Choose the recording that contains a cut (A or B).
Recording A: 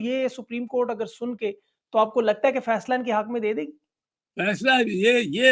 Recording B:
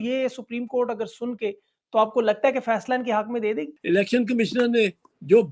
B